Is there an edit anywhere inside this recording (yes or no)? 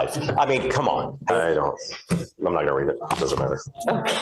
yes